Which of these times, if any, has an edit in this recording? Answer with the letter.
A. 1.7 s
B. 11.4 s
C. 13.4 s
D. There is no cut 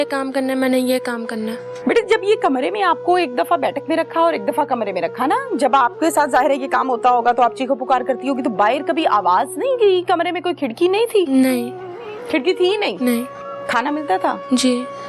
A